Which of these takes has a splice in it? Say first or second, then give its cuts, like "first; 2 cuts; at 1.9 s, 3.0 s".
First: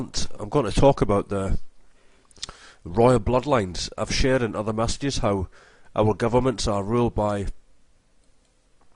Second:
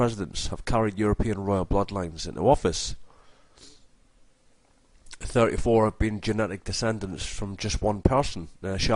second; 1 cut; at 7.7 s